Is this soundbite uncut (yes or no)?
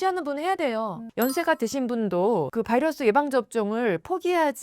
no